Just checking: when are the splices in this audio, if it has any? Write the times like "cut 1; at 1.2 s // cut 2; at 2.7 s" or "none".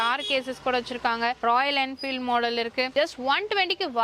cut 1; at 2.9 s

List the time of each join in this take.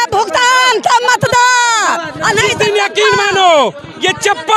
none

